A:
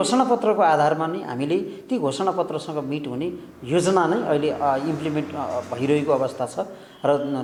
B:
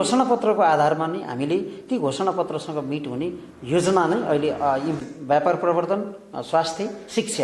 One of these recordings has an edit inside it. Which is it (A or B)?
B